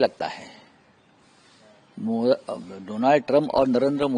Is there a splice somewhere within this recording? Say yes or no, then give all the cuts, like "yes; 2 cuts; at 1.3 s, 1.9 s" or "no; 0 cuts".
no; 0 cuts